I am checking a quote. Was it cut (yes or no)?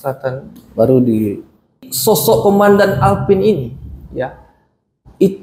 yes